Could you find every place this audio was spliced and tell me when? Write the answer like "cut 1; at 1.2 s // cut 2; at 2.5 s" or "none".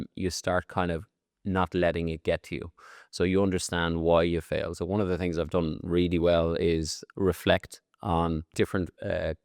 cut 1; at 7.0 s // cut 2; at 8.5 s